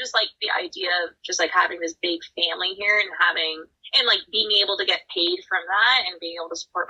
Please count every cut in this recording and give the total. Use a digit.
1